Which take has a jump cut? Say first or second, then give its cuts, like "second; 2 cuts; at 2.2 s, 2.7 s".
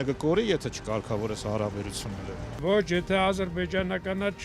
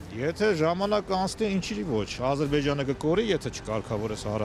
first; 1 cut; at 2.6 s